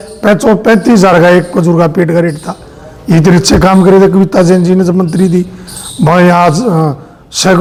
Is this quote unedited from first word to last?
yes; 0 cuts

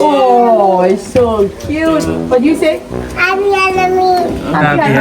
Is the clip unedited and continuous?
yes; 0 cuts

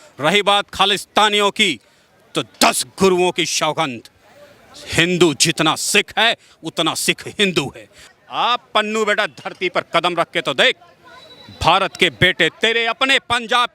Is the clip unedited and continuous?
no; 1 cut; at 8.0 s

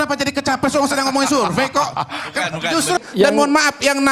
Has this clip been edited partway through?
yes; 1 cut; at 3.1 s

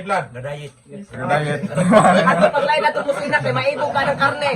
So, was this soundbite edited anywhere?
no; 0 cuts

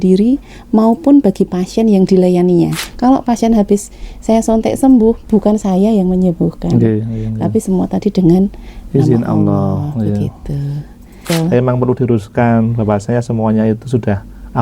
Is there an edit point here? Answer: yes; 2 cuts; at 2.8 s, 11.2 s

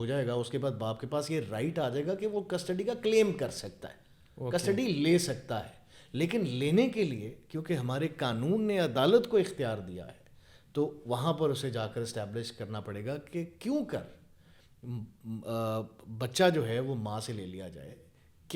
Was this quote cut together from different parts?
no; 0 cuts

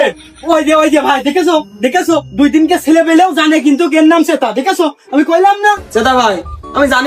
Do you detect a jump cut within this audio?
yes; 1 cut; at 5.8 s

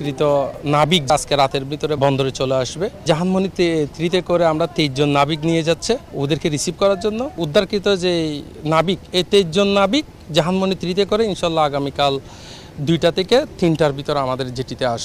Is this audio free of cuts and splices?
no; 5 cuts; at 1.1 s, 2.0 s, 3.0 s, 6.1 s, 7.4 s

